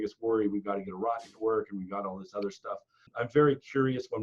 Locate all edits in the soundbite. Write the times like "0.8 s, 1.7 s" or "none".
3.1 s